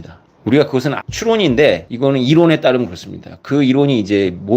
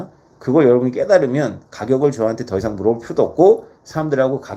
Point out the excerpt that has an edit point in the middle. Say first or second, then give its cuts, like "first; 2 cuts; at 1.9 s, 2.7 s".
first; 2 cuts; at 1.0 s, 1.9 s